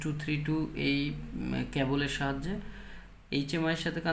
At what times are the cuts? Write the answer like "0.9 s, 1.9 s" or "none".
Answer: none